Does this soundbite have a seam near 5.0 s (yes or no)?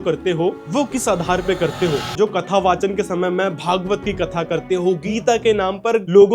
yes